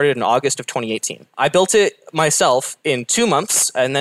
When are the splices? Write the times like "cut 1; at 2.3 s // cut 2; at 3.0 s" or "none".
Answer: cut 1; at 1.4 s